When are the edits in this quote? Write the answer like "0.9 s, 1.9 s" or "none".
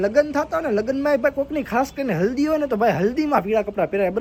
none